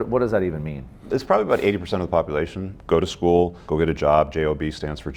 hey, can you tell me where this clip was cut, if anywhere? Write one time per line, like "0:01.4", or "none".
0:01.1
0:02.7
0:03.6